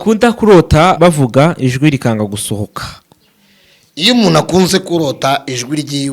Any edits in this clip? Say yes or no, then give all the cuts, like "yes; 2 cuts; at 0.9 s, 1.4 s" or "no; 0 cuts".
yes; 1 cut; at 1.0 s